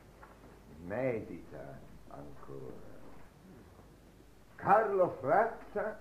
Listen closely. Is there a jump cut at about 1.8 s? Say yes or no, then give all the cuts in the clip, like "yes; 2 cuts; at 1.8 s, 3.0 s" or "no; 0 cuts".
yes; 1 cut; at 1.8 s